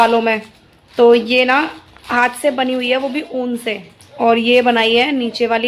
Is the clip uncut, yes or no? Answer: yes